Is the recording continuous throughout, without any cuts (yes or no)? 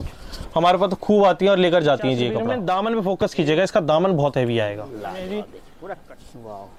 no